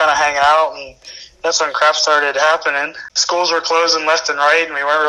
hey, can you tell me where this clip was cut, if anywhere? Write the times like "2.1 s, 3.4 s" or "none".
3.0 s

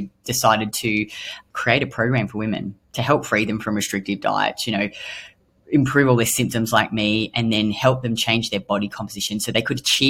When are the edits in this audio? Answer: 1.3 s

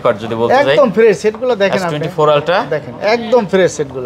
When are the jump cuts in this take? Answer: none

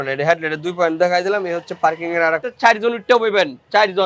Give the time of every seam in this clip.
2.5 s

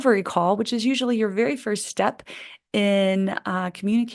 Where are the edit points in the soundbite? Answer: none

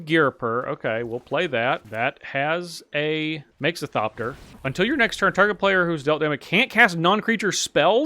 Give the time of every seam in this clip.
1.9 s, 3.5 s, 4.5 s

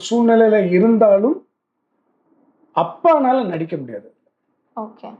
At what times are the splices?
none

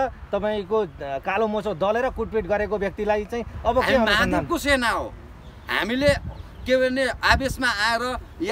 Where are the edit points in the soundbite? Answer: 4.3 s

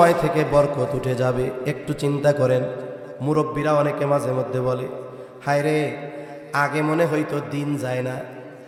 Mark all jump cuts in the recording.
none

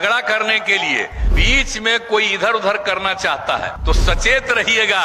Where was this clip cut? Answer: 1.2 s, 3.7 s

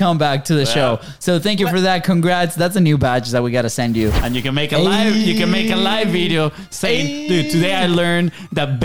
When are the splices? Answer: 4.2 s

